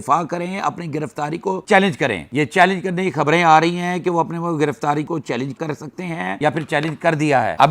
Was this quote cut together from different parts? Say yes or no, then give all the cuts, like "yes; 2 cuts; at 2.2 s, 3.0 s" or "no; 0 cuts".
no; 0 cuts